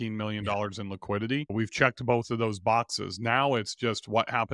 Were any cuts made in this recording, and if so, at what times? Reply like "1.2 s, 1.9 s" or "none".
1.5 s